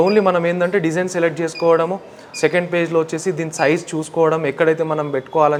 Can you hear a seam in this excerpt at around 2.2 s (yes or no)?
no